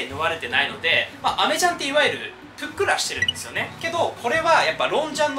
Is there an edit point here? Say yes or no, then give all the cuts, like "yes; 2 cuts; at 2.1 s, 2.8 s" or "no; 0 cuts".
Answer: no; 0 cuts